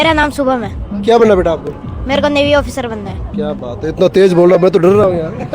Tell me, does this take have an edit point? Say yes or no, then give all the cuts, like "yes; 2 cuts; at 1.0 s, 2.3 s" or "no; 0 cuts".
no; 0 cuts